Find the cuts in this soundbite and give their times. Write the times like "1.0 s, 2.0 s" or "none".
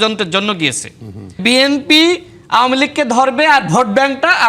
1.4 s